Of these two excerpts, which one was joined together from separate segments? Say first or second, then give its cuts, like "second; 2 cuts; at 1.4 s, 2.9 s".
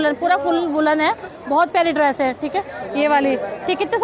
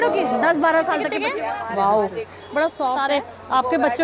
second; 2 cuts; at 1.2 s, 3.0 s